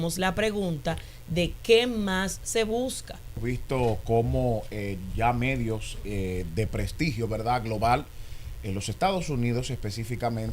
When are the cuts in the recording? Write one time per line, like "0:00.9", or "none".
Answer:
0:03.4